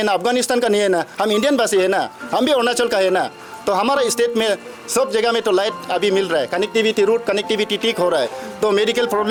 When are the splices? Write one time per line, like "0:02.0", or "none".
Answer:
none